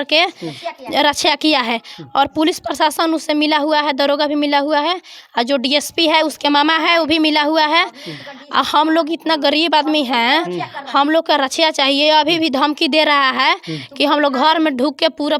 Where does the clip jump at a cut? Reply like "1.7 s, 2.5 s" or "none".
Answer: none